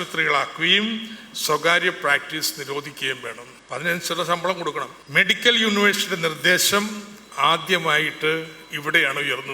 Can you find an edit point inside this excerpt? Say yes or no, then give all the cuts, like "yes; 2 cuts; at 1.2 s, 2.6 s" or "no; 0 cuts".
yes; 2 cuts; at 3.5 s, 5.0 s